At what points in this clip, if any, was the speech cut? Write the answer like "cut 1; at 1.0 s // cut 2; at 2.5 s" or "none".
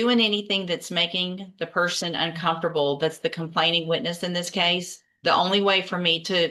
none